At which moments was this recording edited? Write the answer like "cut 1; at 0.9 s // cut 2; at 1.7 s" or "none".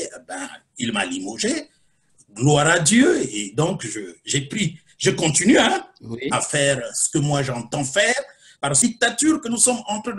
cut 1; at 8.8 s

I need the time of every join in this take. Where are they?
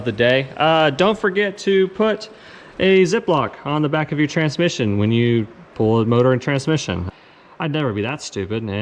cut 1; at 7.1 s

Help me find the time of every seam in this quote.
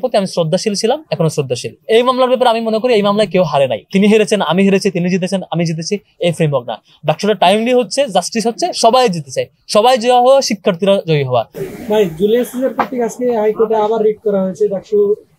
cut 1; at 1.8 s // cut 2; at 3.8 s // cut 3; at 11.5 s

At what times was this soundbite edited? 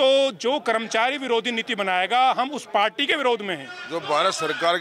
cut 1; at 3.7 s

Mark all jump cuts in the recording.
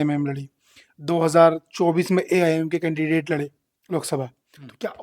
none

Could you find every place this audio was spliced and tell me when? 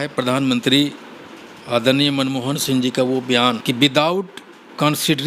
cut 1; at 3.6 s

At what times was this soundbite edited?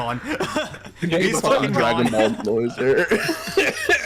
none

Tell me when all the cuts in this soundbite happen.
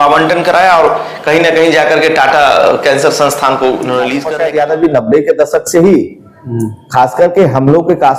cut 1; at 4.2 s

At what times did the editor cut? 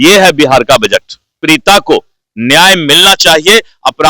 cut 1; at 1.4 s

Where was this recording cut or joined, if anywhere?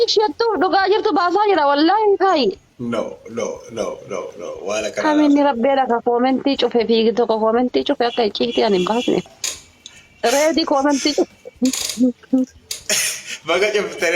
cut 1; at 9.2 s

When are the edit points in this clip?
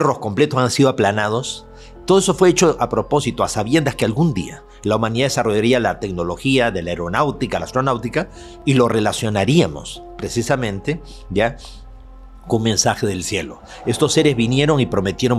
cut 1; at 8.5 s

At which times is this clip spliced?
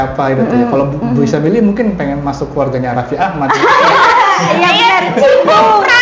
none

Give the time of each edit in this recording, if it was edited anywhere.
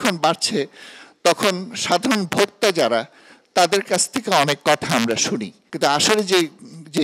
cut 1; at 5.6 s

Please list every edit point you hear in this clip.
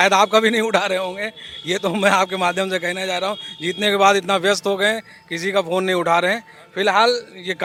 none

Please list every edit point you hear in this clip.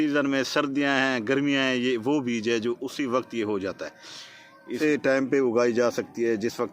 cut 1; at 4.8 s

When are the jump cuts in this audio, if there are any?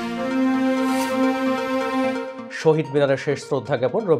cut 1; at 2.4 s

